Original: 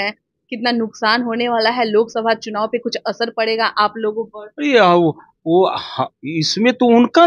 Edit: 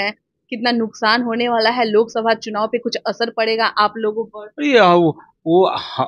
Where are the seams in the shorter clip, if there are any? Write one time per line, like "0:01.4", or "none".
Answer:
none